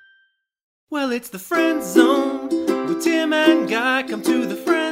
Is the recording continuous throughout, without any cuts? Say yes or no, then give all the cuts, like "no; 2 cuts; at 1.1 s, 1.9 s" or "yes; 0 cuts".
no; 1 cut; at 0.9 s